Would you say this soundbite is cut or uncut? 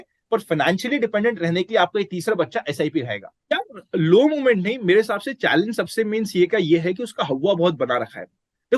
cut